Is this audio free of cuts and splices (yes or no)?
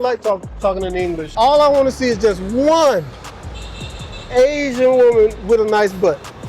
no